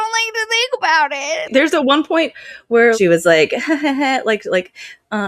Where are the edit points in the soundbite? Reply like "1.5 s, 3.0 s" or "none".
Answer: 1.5 s, 3.0 s